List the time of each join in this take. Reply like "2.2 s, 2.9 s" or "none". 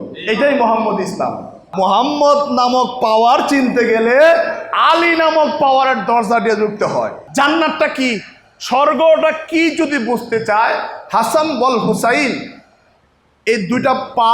1.6 s, 7.2 s